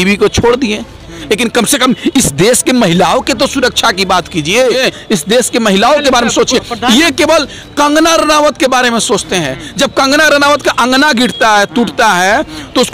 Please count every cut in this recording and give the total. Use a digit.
1